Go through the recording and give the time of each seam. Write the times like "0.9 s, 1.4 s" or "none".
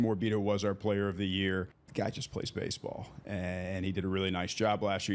1.8 s